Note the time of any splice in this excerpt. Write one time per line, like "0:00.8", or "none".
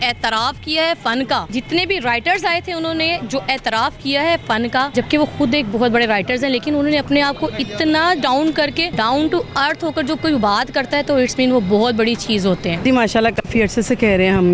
0:01.5
0:04.9
0:08.9
0:12.8